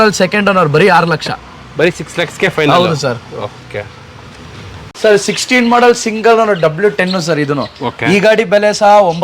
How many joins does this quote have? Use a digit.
1